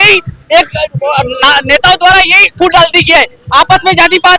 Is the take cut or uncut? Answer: uncut